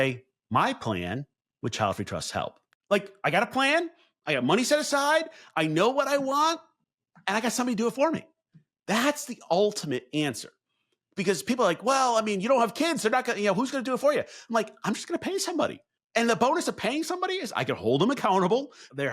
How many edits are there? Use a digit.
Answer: 2